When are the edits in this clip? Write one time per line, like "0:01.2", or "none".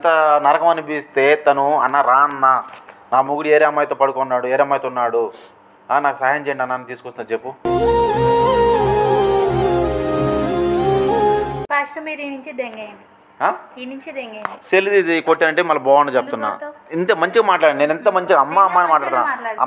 none